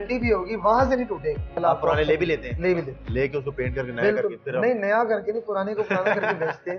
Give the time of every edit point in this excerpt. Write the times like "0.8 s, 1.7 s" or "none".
1.5 s